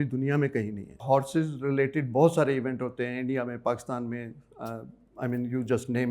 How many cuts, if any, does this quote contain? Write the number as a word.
one